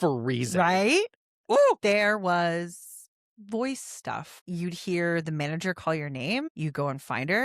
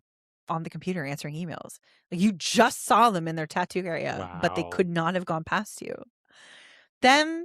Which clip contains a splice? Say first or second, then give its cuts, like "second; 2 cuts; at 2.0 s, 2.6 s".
first; 2 cuts; at 4.4 s, 6.5 s